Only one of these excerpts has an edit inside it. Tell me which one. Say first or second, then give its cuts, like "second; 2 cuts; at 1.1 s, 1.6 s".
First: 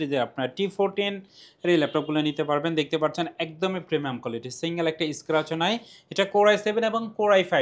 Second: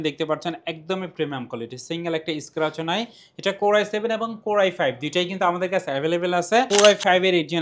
second; 1 cut; at 6.7 s